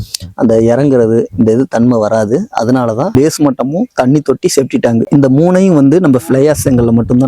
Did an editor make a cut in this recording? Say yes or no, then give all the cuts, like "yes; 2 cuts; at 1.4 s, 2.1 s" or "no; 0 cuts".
yes; 1 cut; at 3.1 s